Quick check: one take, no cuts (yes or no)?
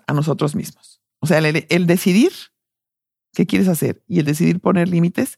yes